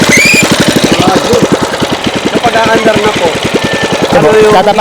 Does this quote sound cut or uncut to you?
cut